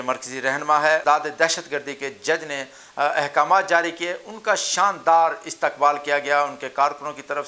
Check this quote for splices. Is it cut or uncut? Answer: cut